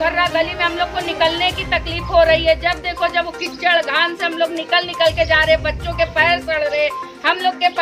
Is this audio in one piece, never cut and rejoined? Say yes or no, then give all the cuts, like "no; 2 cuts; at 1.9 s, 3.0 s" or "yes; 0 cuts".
yes; 0 cuts